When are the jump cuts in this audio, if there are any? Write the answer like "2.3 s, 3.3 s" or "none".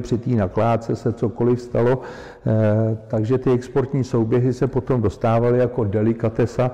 none